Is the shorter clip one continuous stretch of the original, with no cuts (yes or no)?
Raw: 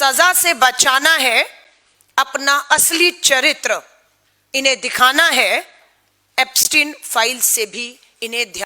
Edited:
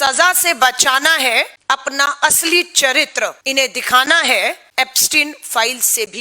no